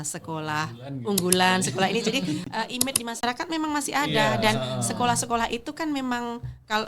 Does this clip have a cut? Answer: no; 0 cuts

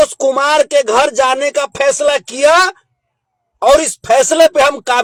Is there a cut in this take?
no; 0 cuts

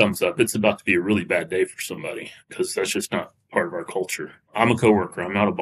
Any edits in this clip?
yes; 2 cuts; at 2.4 s, 4.4 s

